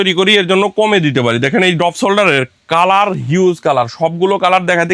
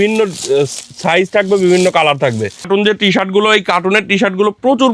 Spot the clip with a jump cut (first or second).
second